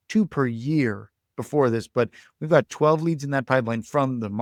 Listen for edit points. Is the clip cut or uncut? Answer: uncut